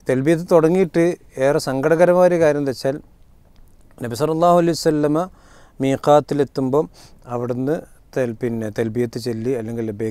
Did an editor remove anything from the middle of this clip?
no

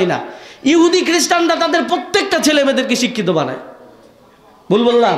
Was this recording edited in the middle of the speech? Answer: no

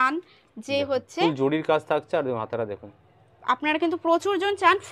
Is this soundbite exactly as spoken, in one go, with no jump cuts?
yes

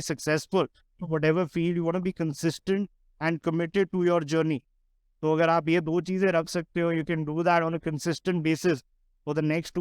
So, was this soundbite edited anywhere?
yes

